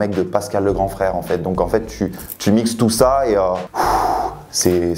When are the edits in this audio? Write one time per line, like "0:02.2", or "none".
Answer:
0:03.7